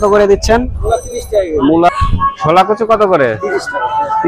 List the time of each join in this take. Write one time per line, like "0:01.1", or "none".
0:01.9